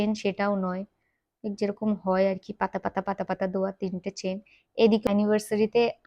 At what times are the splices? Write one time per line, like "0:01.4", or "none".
0:05.1